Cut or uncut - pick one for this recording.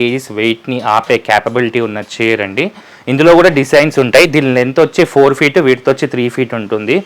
uncut